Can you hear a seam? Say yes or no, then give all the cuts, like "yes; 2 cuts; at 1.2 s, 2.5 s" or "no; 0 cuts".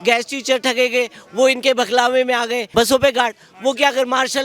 yes; 1 cut; at 2.6 s